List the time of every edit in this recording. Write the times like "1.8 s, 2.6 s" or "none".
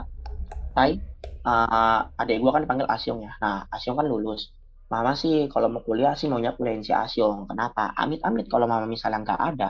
none